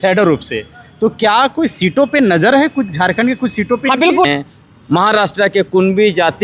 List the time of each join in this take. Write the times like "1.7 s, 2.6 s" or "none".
4.2 s